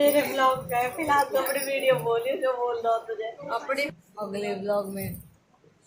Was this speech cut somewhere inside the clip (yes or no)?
yes